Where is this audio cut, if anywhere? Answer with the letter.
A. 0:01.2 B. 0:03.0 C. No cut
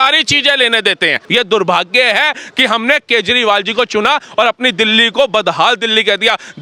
A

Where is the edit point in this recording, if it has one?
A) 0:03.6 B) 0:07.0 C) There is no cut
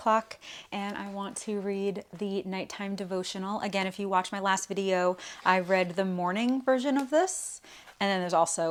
C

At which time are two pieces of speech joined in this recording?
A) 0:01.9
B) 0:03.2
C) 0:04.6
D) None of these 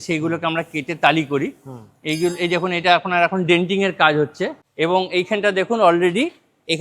C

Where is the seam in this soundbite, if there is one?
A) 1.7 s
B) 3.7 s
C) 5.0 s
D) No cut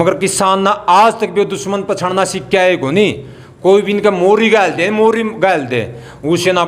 D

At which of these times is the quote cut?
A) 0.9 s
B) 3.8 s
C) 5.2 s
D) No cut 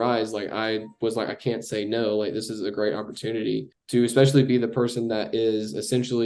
B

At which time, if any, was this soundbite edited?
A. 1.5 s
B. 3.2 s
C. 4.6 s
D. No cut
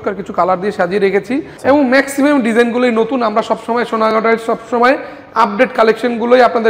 A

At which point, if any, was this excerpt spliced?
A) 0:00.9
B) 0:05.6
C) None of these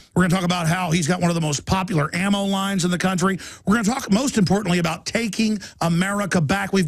B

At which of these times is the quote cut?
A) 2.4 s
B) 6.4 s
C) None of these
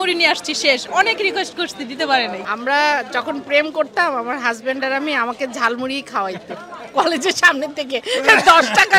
A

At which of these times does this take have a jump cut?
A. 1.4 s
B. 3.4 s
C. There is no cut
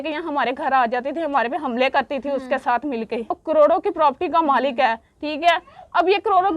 B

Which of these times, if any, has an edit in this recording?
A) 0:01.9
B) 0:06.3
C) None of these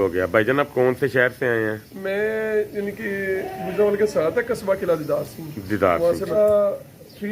B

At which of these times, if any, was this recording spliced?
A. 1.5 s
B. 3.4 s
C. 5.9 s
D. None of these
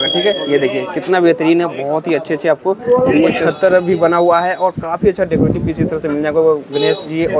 B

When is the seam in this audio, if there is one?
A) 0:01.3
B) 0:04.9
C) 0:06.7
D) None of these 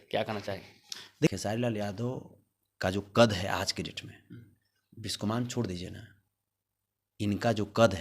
A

